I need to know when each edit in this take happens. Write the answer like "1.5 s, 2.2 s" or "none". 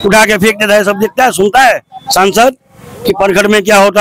none